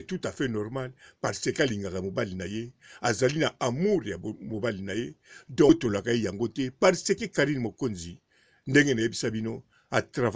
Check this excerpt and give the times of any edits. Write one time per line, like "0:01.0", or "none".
0:05.7